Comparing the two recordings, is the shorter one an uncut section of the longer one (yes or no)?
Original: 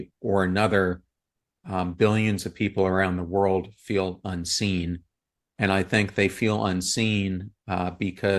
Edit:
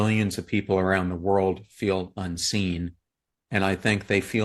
yes